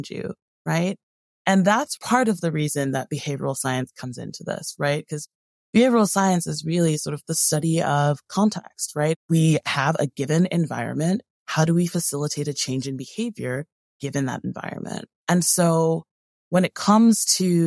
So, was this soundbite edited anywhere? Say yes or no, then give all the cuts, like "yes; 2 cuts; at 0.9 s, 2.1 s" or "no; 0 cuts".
yes; 3 cuts; at 1.9 s, 9.2 s, 15.1 s